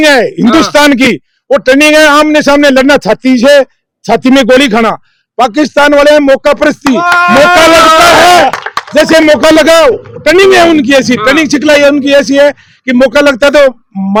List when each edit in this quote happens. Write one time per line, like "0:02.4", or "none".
none